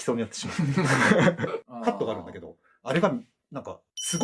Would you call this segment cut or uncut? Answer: cut